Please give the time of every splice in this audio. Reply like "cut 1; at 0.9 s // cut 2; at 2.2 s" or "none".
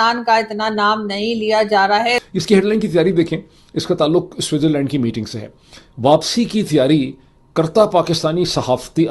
cut 1; at 2.2 s